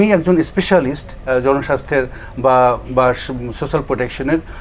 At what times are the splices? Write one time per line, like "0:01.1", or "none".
none